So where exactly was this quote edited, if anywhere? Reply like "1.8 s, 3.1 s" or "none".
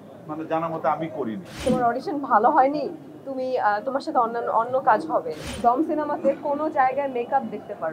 1.6 s, 5.5 s

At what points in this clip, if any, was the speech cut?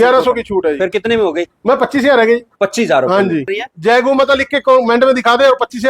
3.6 s

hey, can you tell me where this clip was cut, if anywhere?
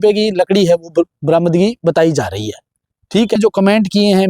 3.4 s

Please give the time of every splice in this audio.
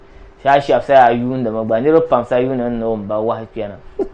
none

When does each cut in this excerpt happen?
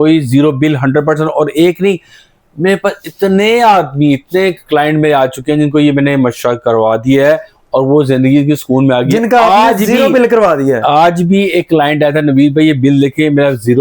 none

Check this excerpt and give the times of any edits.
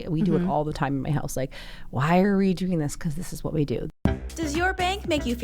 3.9 s

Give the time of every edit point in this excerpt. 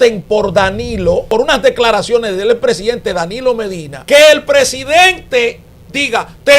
1.3 s, 3.9 s

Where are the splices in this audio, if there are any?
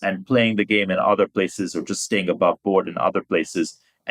none

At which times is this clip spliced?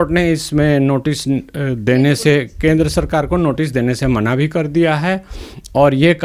none

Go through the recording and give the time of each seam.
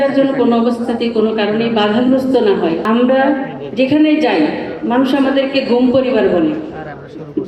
2.8 s

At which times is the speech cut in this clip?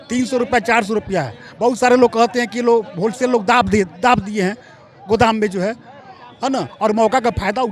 none

